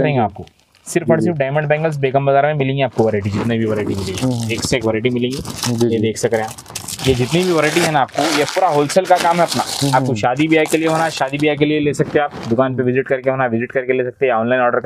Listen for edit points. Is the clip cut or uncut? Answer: uncut